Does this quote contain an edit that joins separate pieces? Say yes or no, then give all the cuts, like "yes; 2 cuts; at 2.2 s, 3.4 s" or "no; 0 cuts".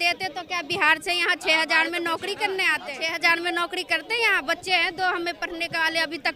yes; 1 cut; at 3.1 s